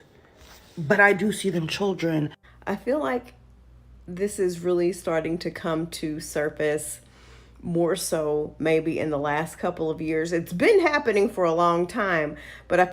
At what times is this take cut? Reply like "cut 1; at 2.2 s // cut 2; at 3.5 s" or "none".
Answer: cut 1; at 2.7 s